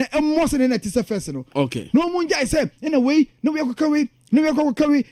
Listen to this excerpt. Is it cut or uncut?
uncut